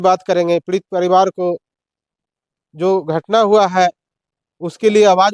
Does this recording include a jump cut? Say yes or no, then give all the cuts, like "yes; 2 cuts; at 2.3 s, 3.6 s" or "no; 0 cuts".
no; 0 cuts